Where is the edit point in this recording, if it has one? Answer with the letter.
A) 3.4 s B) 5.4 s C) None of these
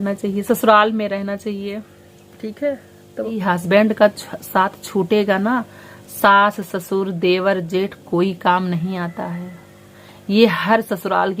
A